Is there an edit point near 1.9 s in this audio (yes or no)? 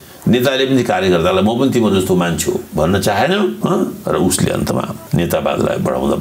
no